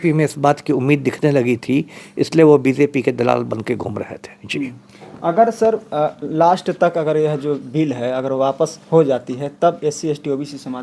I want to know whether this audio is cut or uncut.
uncut